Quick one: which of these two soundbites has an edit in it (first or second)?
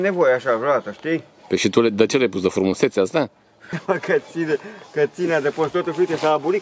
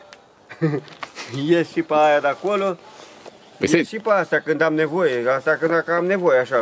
first